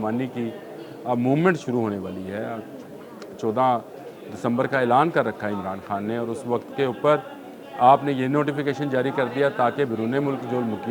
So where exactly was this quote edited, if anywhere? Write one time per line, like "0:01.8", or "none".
none